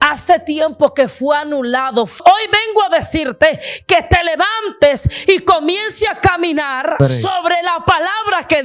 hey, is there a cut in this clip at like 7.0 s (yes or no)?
yes